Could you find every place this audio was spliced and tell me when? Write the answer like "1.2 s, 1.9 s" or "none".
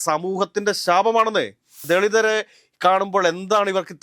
1.8 s